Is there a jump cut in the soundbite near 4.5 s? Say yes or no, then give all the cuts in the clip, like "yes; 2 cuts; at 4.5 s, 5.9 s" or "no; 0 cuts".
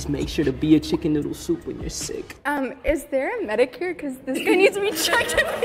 no; 1 cut; at 1.7 s